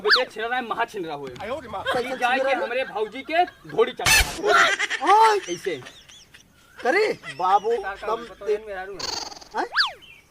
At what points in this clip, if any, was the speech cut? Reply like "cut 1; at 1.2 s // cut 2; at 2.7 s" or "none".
cut 1; at 8.6 s